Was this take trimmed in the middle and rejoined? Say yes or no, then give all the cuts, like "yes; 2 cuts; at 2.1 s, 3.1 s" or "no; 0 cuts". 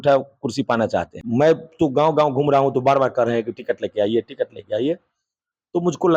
yes; 1 cut; at 1.2 s